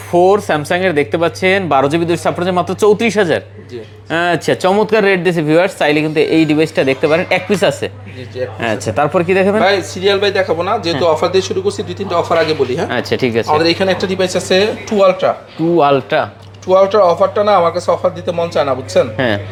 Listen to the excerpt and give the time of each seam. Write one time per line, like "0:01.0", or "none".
none